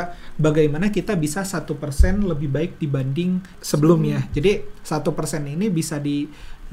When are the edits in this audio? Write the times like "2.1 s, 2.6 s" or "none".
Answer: 3.6 s